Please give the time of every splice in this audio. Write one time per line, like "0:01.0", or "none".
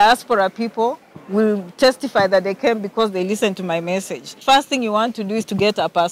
0:04.4